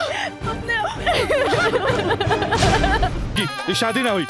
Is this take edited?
yes; 1 cut; at 3.3 s

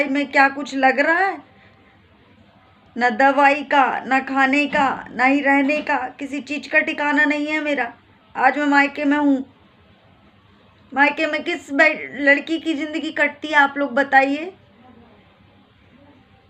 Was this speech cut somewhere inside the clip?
no; 0 cuts

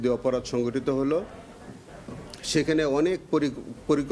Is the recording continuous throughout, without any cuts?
yes; 0 cuts

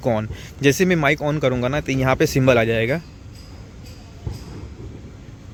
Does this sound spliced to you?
no; 0 cuts

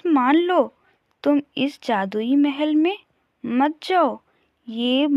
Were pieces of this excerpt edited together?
no; 0 cuts

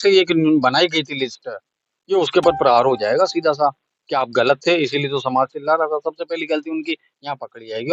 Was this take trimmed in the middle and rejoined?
no; 0 cuts

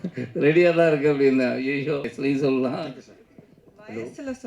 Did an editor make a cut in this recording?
yes; 1 cut; at 2.1 s

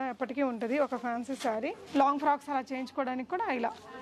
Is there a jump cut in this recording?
yes; 1 cut; at 1.8 s

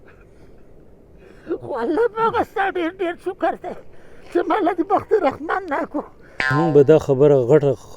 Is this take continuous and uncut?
no; 1 cut; at 6.5 s

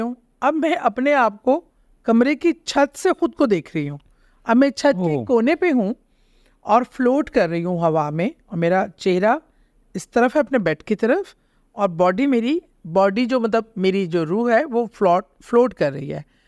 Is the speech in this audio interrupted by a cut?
no; 0 cuts

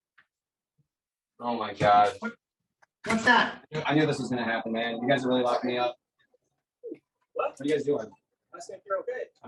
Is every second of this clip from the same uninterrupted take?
yes; 0 cuts

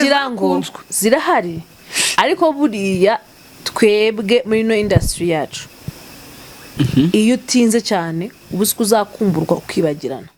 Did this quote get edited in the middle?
no; 0 cuts

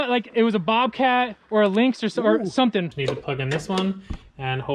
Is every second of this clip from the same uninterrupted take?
no; 1 cut; at 2.9 s

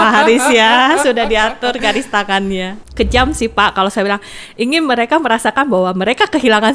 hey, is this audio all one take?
no; 1 cut; at 2.8 s

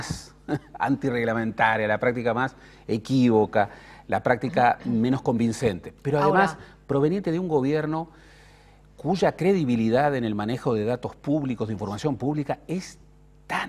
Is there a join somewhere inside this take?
yes; 1 cut; at 7.1 s

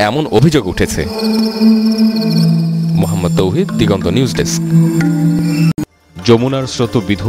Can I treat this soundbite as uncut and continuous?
no; 1 cut; at 5.8 s

